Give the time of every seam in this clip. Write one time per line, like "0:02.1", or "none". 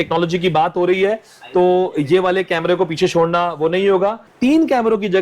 0:04.3

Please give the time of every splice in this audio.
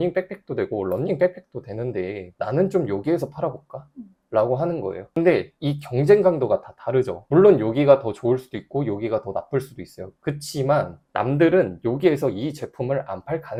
none

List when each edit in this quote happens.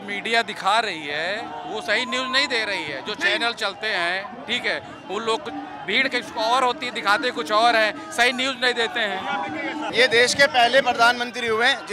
0:09.9

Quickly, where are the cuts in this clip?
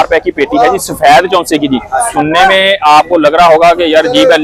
none

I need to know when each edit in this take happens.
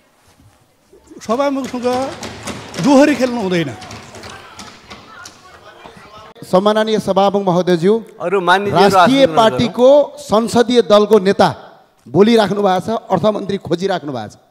0:06.4

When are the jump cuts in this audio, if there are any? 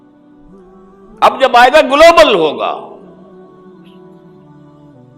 0:01.0
0:03.4

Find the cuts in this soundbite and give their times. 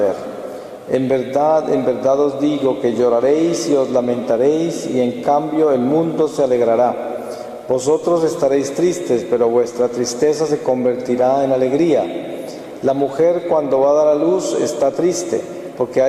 0:04.4

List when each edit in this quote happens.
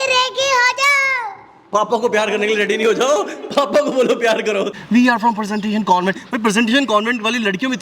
0:04.8

